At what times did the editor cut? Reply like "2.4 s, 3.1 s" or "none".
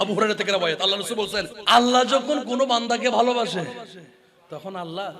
1.6 s